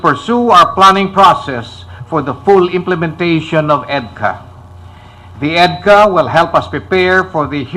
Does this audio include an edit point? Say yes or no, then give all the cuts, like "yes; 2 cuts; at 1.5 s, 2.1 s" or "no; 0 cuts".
yes; 1 cut; at 3.0 s